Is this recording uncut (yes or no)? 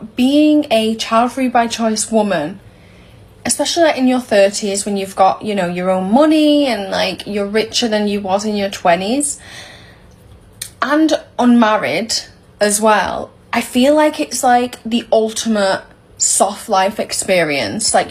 yes